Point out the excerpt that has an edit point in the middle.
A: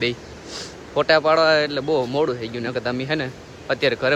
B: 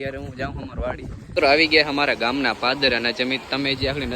B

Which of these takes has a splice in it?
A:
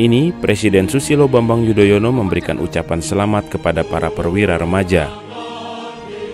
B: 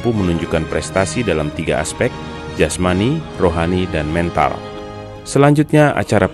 B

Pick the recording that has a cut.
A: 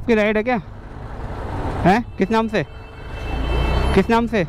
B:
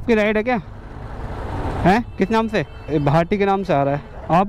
B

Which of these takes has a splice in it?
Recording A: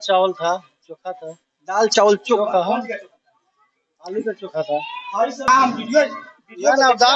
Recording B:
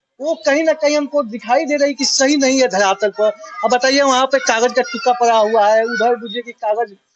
A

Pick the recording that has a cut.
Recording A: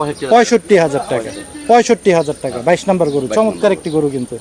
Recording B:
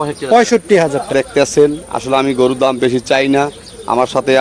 B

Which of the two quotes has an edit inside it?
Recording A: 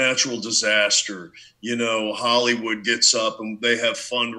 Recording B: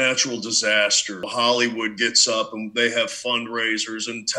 B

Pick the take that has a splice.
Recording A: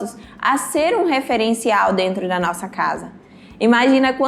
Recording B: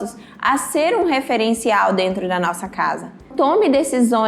B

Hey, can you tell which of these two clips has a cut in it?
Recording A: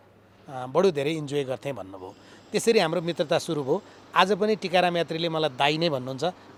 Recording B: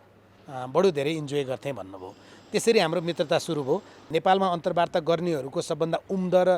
B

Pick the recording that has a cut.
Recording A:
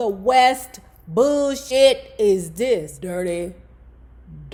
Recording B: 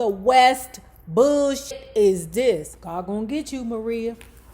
B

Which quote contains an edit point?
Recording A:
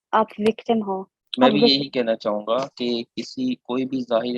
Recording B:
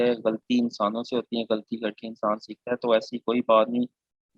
A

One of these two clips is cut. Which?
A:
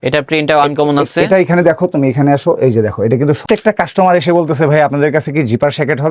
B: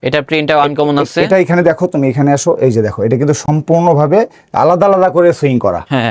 A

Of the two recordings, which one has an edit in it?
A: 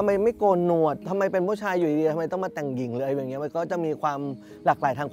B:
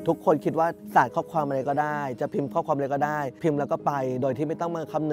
B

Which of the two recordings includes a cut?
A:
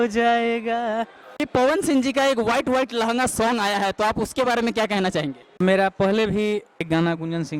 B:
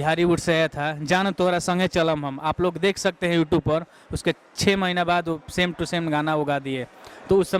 A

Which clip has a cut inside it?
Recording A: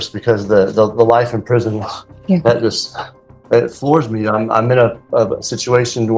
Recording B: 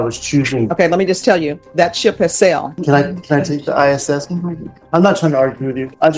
B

